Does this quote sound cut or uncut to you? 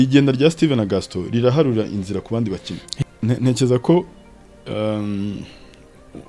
cut